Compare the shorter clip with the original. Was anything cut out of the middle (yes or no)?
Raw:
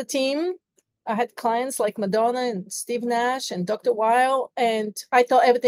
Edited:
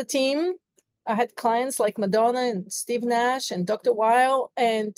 no